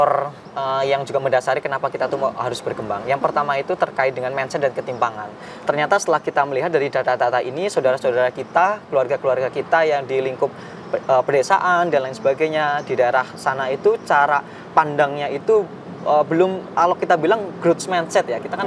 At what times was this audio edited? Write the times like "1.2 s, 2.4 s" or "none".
none